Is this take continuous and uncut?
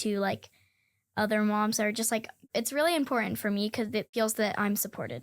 no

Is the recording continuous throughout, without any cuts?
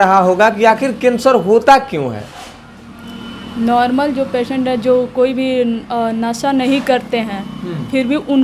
yes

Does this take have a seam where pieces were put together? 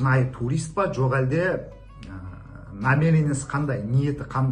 no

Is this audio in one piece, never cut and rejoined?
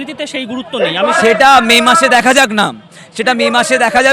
no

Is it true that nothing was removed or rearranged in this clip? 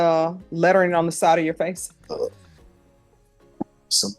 no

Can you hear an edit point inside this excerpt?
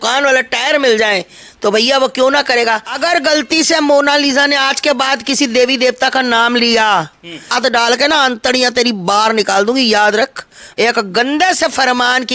yes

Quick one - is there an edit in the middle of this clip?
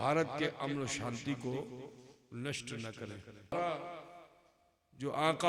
yes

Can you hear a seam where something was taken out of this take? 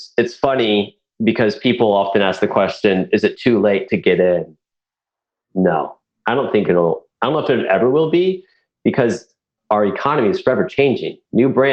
yes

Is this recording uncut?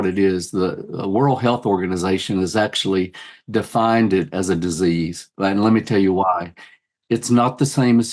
yes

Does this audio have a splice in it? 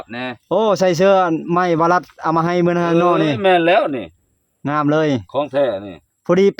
no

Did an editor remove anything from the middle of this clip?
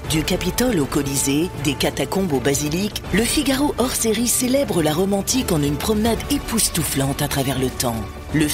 no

